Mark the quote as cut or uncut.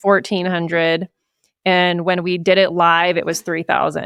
uncut